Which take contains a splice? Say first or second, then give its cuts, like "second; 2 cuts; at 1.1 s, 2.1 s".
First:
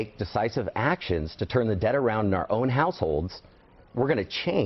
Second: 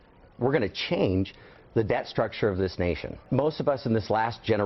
second; 1 cut; at 3.2 s